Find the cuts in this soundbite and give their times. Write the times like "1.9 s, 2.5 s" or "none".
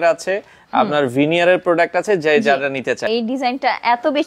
3.0 s